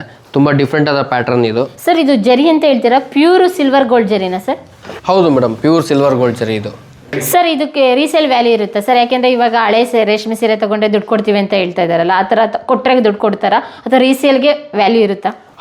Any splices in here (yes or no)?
no